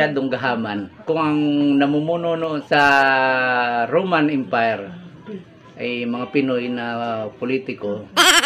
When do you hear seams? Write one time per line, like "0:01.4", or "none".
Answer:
0:00.9
0:02.6